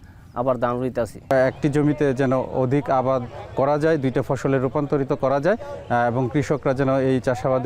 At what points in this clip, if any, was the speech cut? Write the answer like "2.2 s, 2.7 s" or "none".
1.3 s